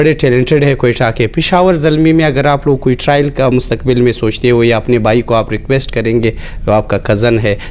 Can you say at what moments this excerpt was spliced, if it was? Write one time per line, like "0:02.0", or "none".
none